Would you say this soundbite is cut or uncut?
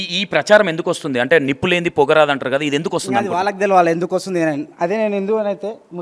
uncut